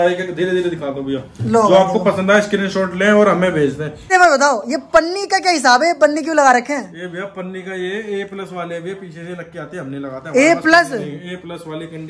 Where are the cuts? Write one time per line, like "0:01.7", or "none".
0:03.9

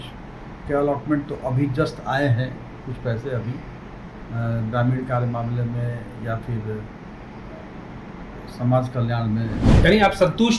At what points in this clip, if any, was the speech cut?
0:09.7

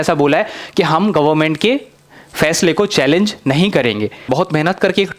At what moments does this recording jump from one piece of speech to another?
0:04.2

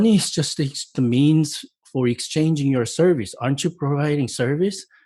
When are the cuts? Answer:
0:00.9

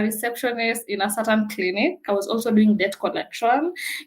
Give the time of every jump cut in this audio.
0:02.1

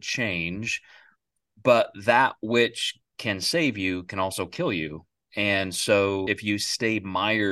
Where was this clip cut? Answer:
0:06.3

